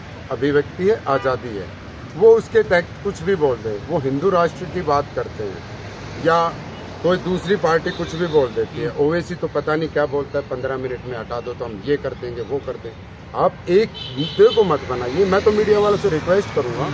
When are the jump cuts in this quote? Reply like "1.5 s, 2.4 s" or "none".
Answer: none